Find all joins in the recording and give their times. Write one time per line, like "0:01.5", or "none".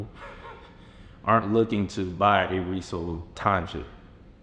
0:03.4